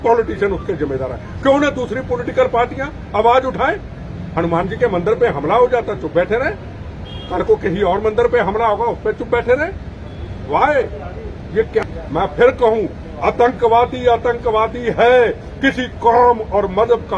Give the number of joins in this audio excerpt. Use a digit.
1